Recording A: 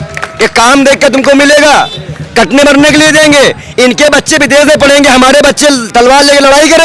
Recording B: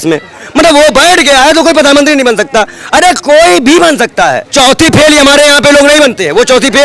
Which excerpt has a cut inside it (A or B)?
B